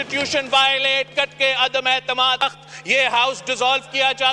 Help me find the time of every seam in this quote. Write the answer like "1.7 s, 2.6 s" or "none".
2.4 s